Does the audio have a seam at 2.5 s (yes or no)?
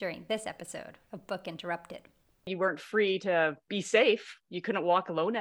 yes